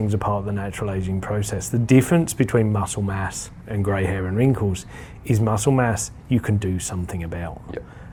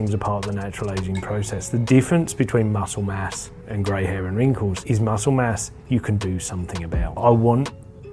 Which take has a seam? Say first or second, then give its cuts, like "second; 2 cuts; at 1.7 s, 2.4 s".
second; 2 cuts; at 4.8 s, 7.2 s